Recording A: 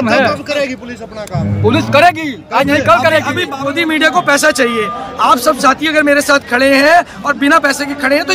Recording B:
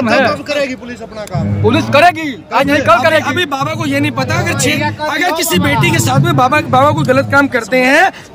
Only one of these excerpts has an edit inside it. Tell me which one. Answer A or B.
A